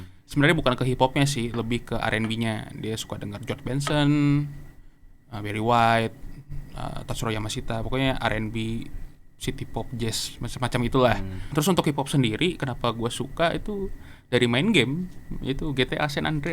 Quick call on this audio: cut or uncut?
cut